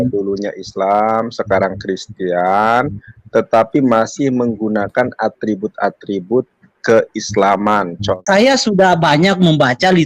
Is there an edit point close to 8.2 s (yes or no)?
yes